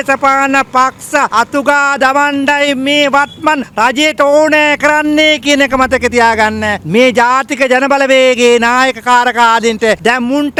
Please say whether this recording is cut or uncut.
uncut